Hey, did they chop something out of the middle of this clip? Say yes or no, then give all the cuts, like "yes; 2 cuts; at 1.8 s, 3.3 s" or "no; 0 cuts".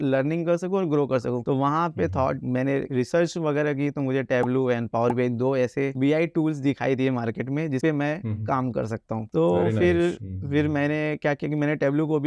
no; 0 cuts